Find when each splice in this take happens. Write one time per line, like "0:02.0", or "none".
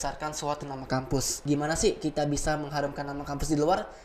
0:01.3